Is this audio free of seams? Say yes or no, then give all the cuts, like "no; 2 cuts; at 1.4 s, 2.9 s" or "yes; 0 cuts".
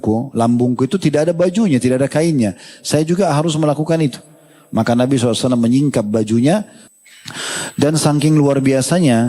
no; 1 cut; at 6.8 s